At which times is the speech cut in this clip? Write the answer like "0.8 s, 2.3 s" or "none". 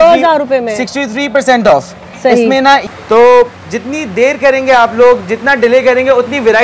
2.9 s